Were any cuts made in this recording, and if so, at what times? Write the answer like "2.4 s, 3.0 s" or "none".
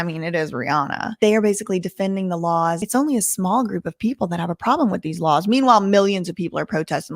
1.1 s, 2.8 s